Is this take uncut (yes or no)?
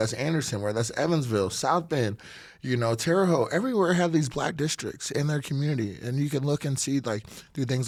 yes